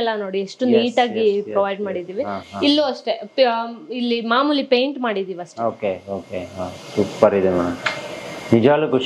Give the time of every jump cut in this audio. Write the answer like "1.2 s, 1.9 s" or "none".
none